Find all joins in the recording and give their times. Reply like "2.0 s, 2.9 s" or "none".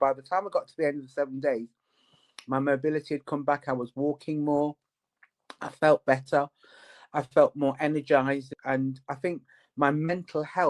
none